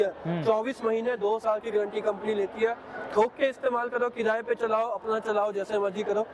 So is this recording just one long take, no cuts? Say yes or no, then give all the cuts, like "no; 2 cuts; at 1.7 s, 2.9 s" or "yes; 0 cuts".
yes; 0 cuts